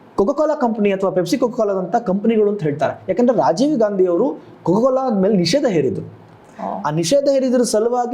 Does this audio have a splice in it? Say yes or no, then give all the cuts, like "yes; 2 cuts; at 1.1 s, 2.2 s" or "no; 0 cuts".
no; 0 cuts